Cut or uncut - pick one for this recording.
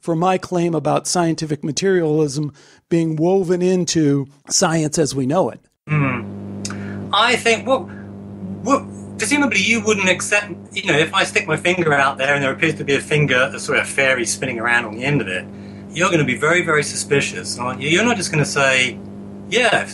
cut